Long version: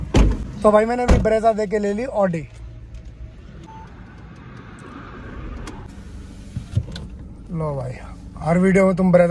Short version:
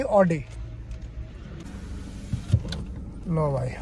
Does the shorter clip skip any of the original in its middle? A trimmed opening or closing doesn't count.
yes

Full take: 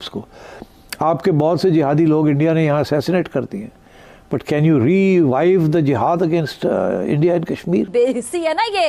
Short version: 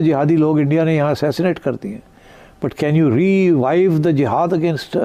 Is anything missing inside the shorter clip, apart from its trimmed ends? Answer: no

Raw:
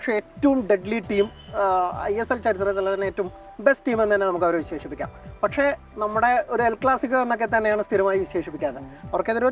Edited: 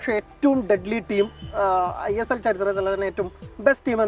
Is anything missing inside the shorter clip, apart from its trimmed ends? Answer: no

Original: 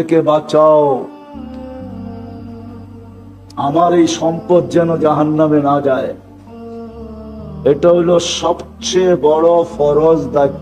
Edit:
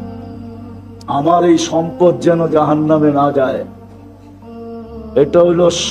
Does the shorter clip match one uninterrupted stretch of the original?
no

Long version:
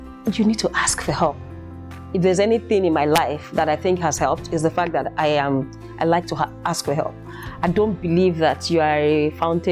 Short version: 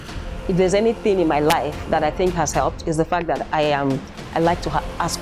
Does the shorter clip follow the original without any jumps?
yes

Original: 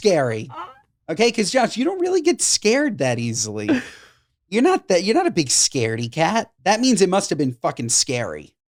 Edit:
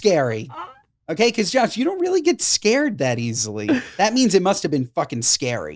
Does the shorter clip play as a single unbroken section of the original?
no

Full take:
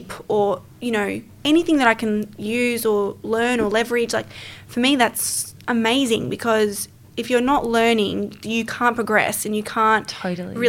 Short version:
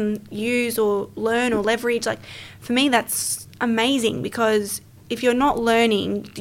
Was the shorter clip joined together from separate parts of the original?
no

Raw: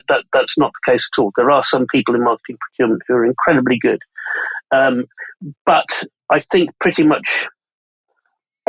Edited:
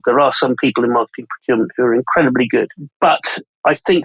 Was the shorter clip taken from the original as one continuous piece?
no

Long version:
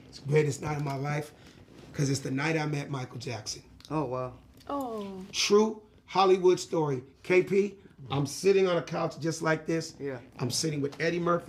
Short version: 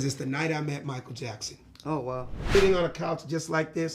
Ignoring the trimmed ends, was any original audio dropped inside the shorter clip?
yes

